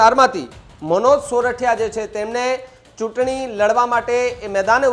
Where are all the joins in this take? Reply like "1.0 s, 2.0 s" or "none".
none